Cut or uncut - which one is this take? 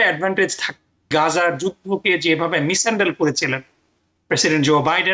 cut